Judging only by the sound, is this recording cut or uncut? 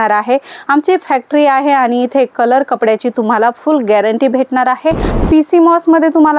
cut